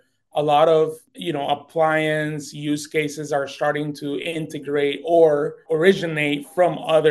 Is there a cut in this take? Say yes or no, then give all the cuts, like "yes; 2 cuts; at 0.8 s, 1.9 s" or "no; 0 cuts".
yes; 2 cuts; at 1.1 s, 5.6 s